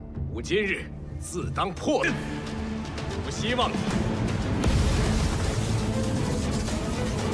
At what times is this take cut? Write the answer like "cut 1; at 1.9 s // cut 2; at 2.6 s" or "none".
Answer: none